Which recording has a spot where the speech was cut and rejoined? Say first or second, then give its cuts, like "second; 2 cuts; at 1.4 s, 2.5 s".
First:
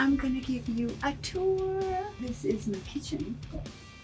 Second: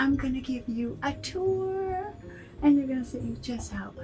first; 1 cut; at 2.1 s